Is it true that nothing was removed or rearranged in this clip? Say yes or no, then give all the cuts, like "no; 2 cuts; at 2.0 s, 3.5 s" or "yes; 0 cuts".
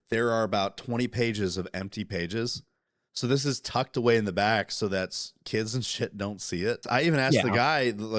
no; 1 cut; at 6.8 s